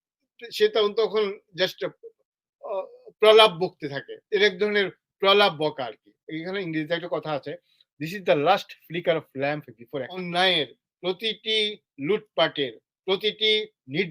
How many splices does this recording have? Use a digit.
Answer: 1